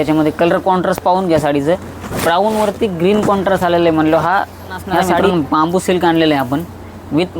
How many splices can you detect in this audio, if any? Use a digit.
1